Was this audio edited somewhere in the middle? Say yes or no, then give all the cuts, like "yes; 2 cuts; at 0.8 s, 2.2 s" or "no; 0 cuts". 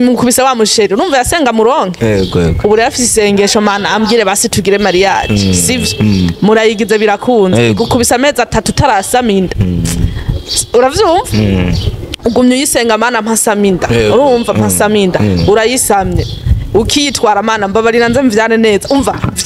no; 0 cuts